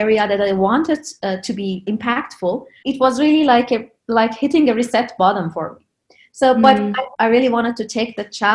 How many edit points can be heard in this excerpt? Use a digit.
2